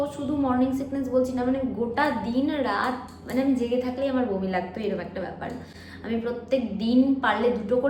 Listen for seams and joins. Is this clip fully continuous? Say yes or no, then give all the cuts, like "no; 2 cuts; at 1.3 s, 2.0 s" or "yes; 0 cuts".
yes; 0 cuts